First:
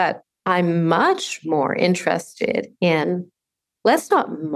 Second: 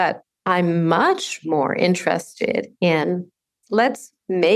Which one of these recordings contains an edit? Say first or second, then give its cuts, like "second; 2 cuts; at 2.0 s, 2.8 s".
second; 1 cut; at 3.6 s